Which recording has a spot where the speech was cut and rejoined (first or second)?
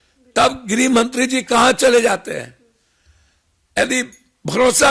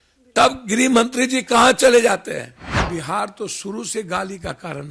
second